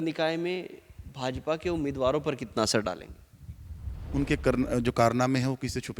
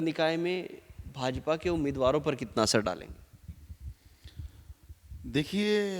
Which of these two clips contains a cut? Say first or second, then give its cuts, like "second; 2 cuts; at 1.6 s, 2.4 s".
first; 1 cut; at 4.0 s